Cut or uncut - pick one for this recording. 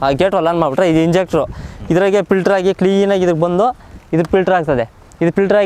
uncut